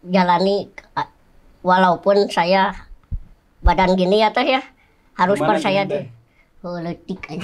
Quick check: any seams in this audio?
no; 0 cuts

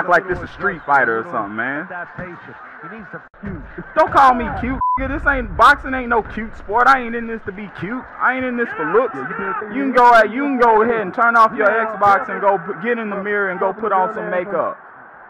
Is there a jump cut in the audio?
yes; 2 cuts; at 3.3 s, 9.5 s

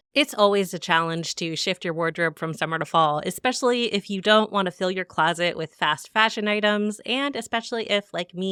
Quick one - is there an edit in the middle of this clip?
no; 0 cuts

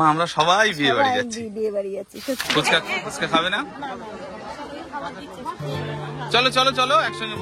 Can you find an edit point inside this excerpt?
yes; 1 cut; at 2.4 s

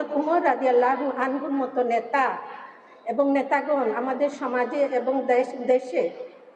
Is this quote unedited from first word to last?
yes; 0 cuts

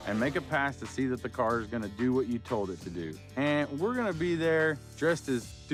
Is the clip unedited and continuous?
yes; 0 cuts

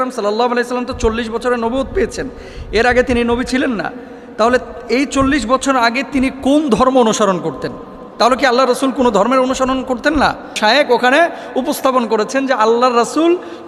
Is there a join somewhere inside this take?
yes; 1 cut; at 10.6 s

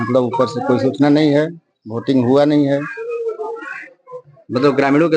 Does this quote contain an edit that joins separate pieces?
no; 0 cuts

